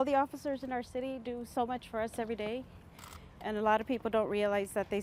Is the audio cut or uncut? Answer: uncut